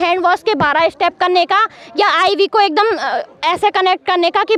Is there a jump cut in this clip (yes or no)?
no